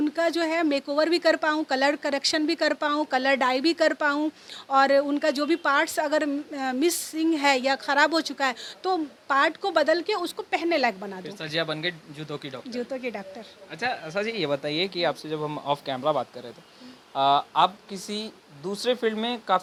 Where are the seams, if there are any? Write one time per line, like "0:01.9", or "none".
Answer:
none